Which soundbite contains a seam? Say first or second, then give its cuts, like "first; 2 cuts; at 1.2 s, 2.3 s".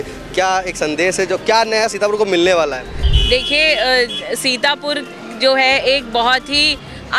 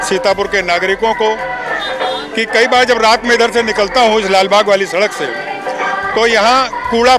first; 1 cut; at 3.1 s